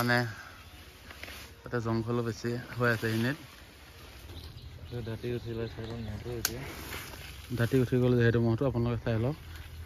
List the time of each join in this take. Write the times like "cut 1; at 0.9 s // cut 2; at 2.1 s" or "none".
cut 1; at 4.4 s